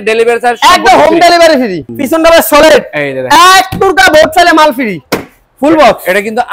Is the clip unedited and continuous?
no; 2 cuts; at 1.8 s, 5.1 s

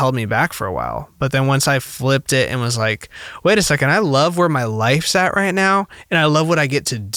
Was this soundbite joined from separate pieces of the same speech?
no; 0 cuts

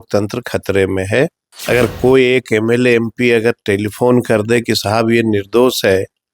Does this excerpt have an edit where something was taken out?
yes; 1 cut; at 1.5 s

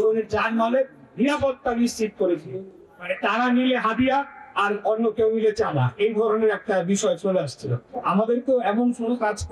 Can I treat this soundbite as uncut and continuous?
no; 2 cuts; at 2.5 s, 7.9 s

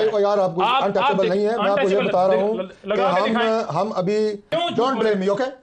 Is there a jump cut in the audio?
yes; 1 cut; at 4.5 s

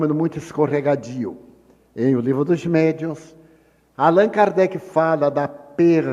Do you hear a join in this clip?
no; 0 cuts

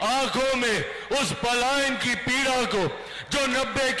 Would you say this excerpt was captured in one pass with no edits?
yes; 0 cuts

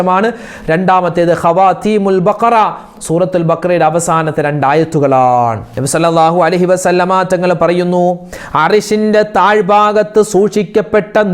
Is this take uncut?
no; 1 cut; at 5.7 s

